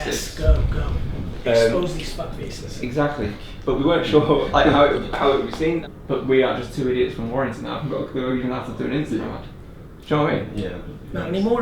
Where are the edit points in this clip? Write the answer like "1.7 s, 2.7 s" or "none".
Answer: 5.9 s